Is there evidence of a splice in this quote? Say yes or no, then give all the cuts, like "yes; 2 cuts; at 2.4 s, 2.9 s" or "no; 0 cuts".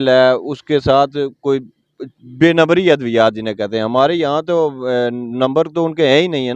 no; 0 cuts